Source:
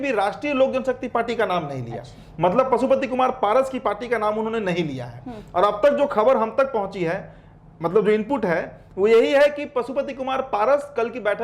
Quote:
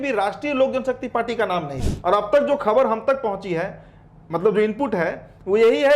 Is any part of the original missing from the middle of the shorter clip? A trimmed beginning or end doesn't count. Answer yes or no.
yes